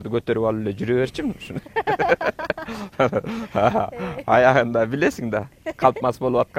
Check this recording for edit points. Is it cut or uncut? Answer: uncut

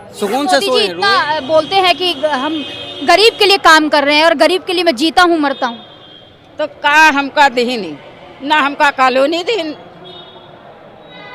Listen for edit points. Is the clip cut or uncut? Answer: cut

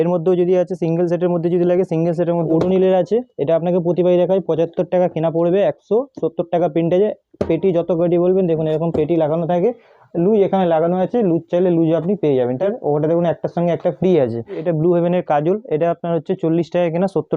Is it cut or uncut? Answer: cut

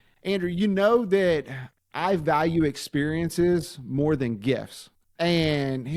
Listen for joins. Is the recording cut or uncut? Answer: uncut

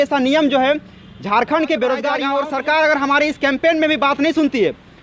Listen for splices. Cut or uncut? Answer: cut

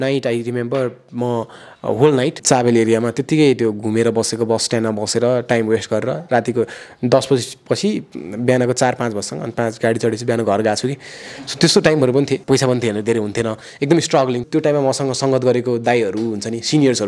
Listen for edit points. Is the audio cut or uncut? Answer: cut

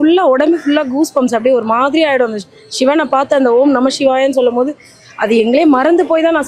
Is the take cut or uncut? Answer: uncut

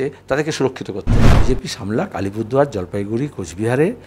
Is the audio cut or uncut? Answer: cut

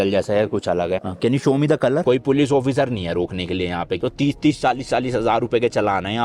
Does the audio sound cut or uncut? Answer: cut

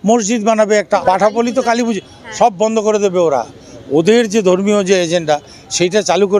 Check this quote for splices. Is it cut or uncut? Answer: cut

